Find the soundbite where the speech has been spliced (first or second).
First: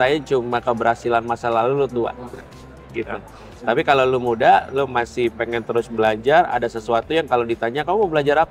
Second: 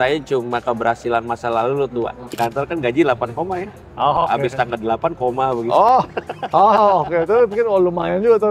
second